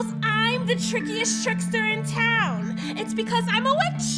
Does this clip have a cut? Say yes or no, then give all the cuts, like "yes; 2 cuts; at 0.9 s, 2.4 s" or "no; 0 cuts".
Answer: no; 0 cuts